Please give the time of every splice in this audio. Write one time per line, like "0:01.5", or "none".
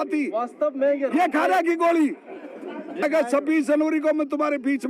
0:03.0